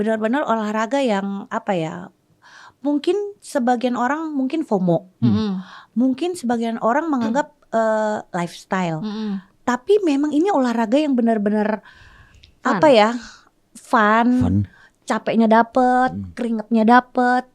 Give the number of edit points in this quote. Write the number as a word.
zero